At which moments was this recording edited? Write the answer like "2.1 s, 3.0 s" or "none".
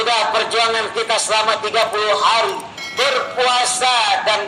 none